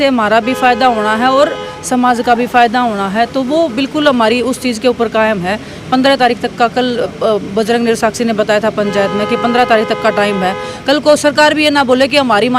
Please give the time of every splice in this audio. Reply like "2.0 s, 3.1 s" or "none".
none